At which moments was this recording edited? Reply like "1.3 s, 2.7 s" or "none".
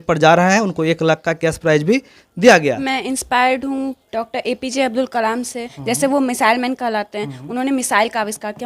2.8 s, 4.0 s, 5.7 s